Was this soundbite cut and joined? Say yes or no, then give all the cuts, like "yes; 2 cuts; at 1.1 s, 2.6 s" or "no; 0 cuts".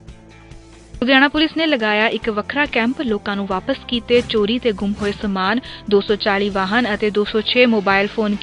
yes; 1 cut; at 1.0 s